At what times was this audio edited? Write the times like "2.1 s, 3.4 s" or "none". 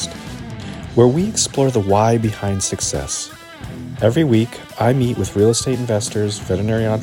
none